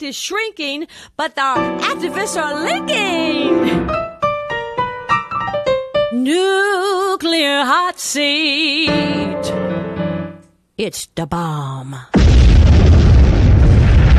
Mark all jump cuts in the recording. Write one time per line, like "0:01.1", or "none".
none